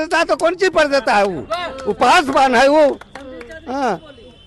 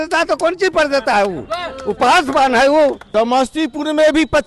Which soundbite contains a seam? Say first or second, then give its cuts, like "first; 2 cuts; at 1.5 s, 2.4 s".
second; 1 cut; at 3.0 s